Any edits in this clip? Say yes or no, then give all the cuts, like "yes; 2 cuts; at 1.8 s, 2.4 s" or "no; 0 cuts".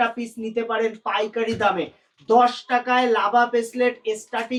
no; 0 cuts